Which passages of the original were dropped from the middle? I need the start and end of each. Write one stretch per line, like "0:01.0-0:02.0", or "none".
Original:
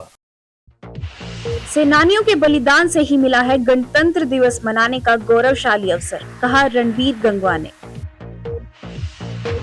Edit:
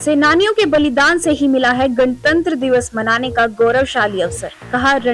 none